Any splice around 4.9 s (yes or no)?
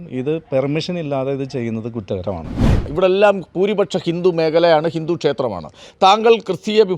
no